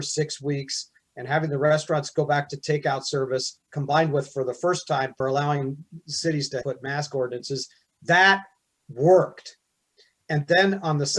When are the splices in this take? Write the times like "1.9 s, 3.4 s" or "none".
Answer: none